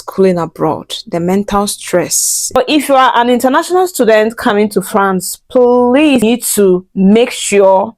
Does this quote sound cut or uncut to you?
cut